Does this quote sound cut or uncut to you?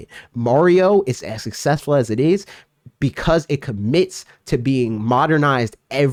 uncut